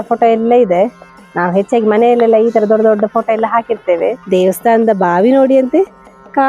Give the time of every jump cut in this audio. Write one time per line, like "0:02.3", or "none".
0:04.2